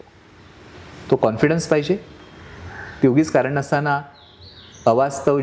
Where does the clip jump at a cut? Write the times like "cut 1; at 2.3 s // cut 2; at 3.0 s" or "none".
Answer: none